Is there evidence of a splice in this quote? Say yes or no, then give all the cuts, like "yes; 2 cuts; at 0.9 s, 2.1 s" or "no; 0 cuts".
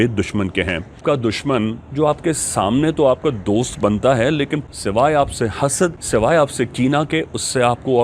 yes; 3 cuts; at 1.0 s, 4.7 s, 6.0 s